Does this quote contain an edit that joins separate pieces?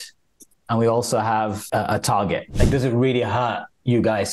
yes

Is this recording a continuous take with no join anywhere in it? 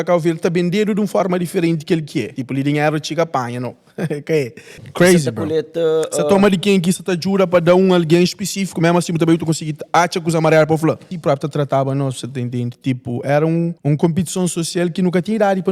no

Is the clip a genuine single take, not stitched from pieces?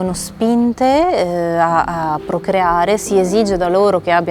yes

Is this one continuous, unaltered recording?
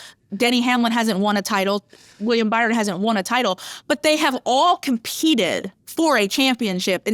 yes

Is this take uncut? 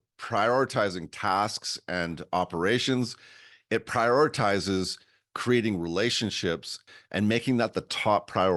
no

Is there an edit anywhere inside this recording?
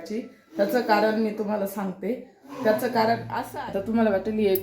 yes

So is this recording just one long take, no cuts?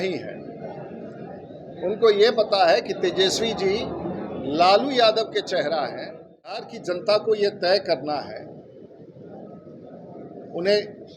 no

